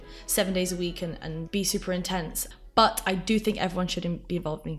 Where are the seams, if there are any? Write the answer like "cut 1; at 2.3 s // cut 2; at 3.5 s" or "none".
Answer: cut 1; at 1.4 s // cut 2; at 2.4 s